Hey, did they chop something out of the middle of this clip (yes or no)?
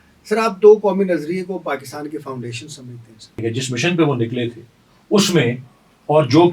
yes